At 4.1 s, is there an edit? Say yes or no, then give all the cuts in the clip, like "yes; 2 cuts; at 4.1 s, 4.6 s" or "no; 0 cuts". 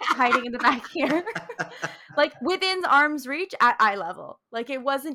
no; 0 cuts